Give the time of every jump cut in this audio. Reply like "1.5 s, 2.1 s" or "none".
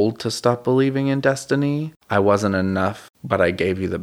1.9 s, 3.1 s